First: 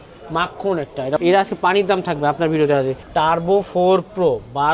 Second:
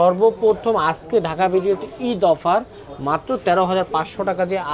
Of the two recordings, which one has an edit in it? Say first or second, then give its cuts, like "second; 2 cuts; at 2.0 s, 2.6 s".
first; 2 cuts; at 1.2 s, 3.0 s